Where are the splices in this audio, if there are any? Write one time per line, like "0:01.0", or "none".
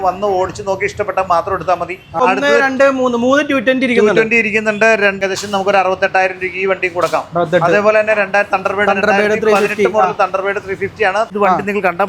0:02.2
0:05.2
0:11.3